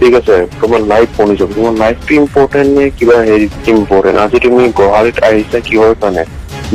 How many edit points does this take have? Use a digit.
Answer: 0